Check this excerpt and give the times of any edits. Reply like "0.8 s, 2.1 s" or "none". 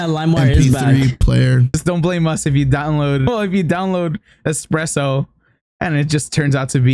1.7 s, 3.3 s